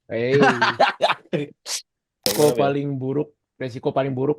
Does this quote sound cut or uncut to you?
cut